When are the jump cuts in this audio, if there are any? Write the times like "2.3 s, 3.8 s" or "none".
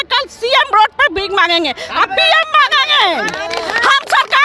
none